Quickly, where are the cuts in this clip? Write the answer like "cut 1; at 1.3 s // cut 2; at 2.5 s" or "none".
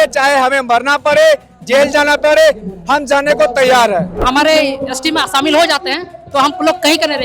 cut 1; at 4.2 s